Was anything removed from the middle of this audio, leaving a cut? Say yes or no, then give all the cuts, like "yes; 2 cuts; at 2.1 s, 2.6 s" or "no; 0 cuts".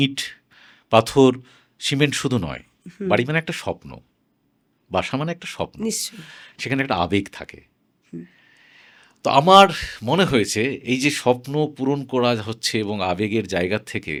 no; 0 cuts